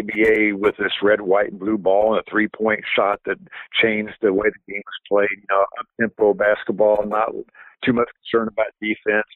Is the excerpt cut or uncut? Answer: uncut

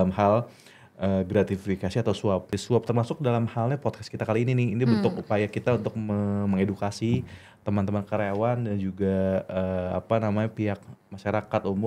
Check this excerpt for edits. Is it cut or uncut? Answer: cut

